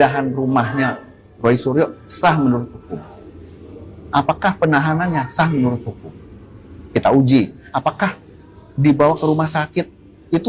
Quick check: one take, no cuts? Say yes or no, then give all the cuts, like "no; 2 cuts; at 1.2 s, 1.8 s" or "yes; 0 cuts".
yes; 0 cuts